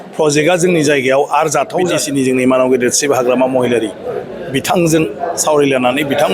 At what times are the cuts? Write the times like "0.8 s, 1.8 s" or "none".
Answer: 2.0 s